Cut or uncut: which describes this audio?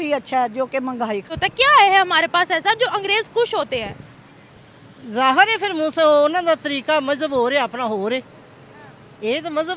cut